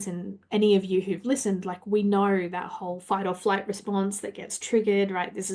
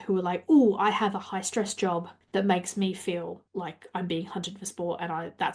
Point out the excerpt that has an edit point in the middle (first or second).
second